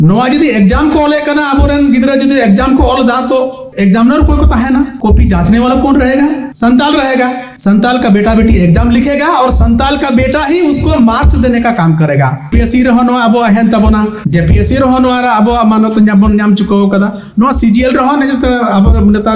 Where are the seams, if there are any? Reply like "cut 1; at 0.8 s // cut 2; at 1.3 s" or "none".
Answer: cut 1; at 3.6 s // cut 2; at 4.9 s // cut 3; at 6.5 s // cut 4; at 7.5 s // cut 5; at 12.6 s // cut 6; at 14.2 s

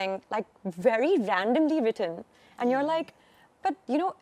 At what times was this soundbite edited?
none

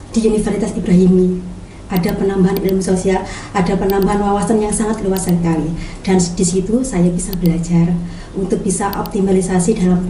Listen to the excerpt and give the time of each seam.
none

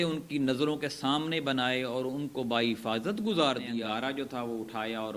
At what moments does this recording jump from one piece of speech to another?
cut 1; at 3.7 s

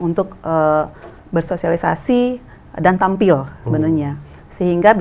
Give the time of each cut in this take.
none

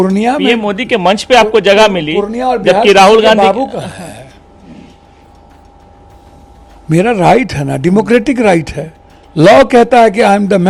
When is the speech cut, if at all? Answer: none

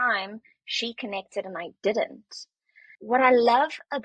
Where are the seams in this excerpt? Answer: cut 1; at 2.9 s

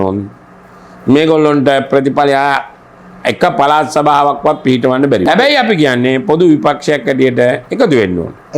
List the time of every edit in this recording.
none

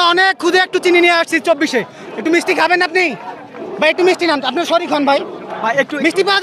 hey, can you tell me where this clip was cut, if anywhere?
none

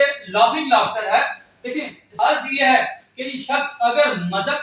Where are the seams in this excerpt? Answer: cut 1; at 2.0 s

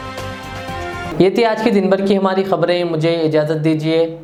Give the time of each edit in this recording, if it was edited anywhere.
none

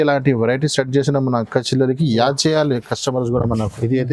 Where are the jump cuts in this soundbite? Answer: none

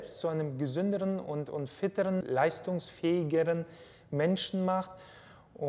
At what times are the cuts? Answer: cut 1; at 2.2 s

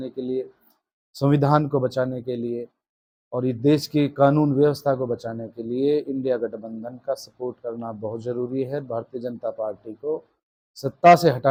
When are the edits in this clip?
none

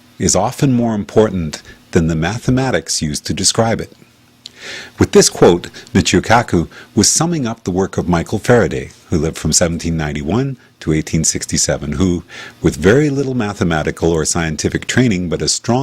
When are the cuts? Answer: cut 1; at 1.5 s

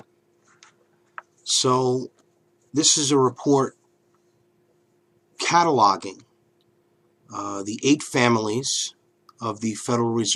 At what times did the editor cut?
none

